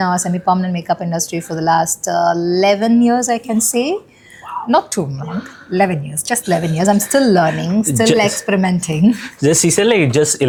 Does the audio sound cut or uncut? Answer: uncut